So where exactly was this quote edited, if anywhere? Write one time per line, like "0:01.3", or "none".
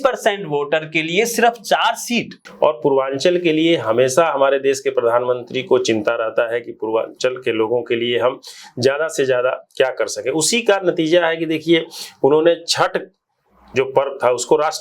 0:02.4